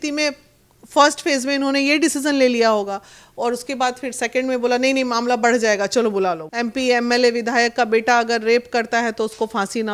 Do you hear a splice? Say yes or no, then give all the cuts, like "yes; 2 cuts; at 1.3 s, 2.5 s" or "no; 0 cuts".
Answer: yes; 1 cut; at 6.5 s